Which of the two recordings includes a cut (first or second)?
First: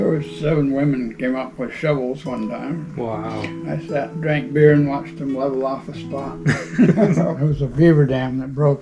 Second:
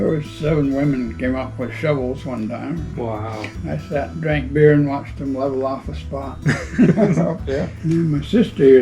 first